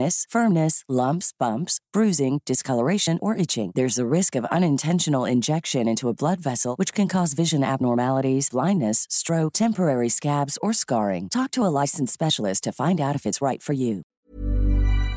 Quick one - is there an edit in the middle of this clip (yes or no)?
yes